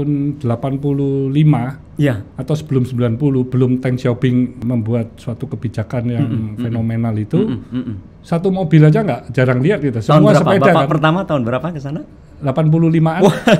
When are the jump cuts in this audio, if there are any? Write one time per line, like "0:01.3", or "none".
none